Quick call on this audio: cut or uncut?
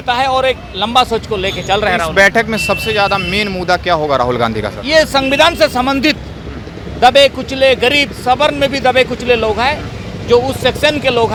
uncut